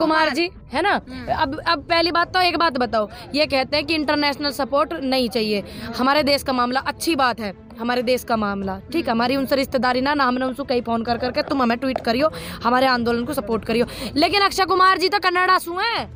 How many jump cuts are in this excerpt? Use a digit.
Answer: 0